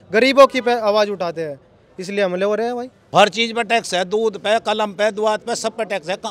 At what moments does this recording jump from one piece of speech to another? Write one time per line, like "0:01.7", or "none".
0:02.9